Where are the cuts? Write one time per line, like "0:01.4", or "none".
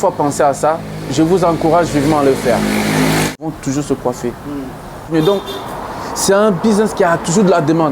0:03.4
0:05.1